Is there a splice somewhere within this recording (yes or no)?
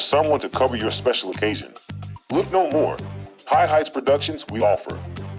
no